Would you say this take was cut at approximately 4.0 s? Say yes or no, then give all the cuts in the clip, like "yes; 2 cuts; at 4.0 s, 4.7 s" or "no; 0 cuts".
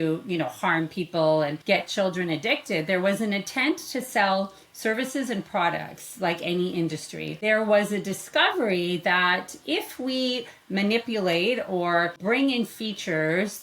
no; 3 cuts; at 1.6 s, 7.4 s, 12.2 s